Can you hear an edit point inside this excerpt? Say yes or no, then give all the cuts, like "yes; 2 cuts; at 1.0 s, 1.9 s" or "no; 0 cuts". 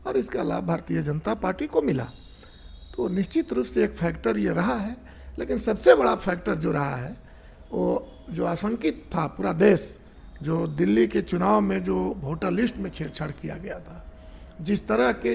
no; 0 cuts